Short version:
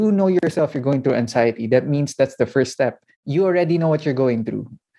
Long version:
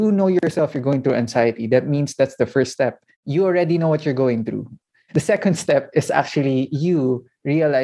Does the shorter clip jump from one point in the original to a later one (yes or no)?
no